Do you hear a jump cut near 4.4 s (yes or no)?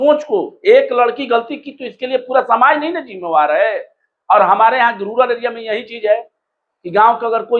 no